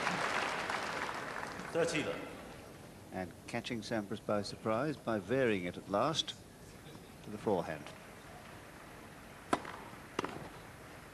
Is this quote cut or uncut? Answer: cut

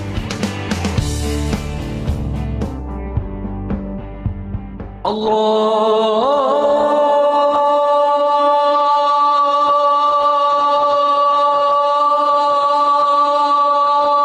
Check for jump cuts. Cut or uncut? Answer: uncut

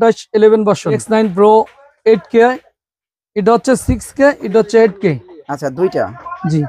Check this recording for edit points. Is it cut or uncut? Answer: cut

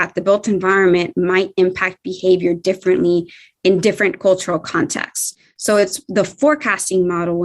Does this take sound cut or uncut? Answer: uncut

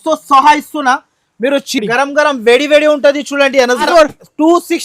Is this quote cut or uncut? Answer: cut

